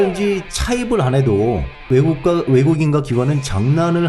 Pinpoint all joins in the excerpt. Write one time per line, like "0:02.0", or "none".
0:01.7